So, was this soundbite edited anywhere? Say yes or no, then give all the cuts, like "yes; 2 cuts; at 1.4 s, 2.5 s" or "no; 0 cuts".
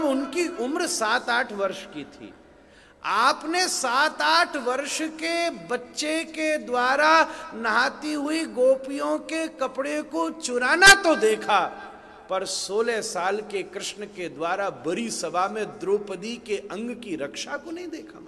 no; 0 cuts